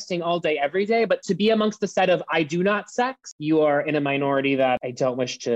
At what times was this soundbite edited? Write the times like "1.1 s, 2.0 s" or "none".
1.2 s, 3.3 s, 4.8 s